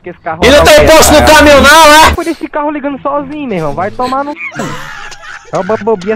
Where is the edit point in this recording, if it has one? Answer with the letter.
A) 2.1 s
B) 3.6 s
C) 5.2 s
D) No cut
A